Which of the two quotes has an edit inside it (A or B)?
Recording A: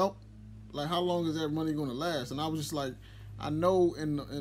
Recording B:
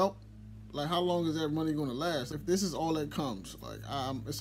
B